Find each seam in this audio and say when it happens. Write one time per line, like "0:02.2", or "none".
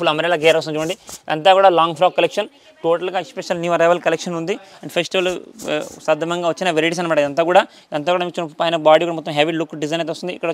none